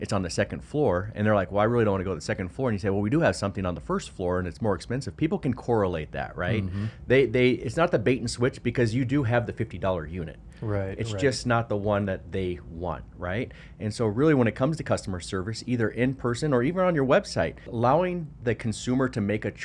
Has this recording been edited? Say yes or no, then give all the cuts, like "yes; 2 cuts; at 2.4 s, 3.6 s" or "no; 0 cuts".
yes; 1 cut; at 17.7 s